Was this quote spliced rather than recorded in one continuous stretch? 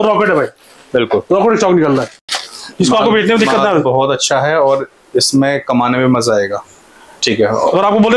no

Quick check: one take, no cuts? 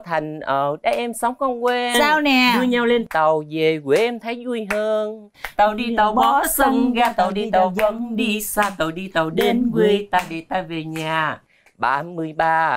yes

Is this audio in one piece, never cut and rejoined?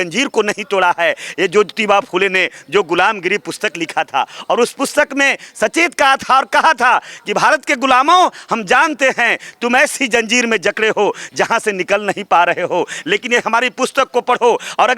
yes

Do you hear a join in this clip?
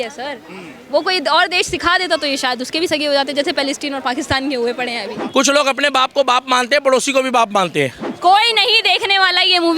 yes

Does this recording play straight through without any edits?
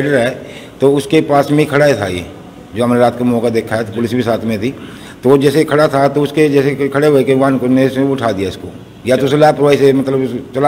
yes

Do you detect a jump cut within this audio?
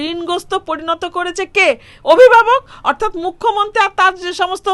no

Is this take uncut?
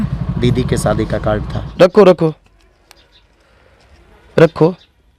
no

